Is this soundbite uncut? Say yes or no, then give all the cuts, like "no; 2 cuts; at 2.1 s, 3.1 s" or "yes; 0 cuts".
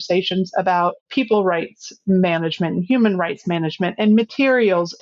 no; 1 cut; at 1.1 s